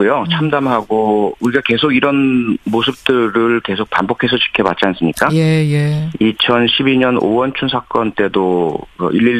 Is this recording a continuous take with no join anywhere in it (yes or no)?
no